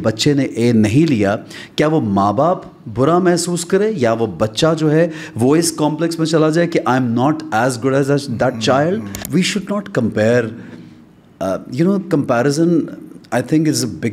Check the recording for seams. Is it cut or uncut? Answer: cut